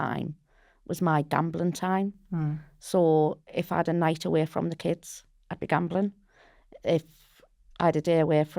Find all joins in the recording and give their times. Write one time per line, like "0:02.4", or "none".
none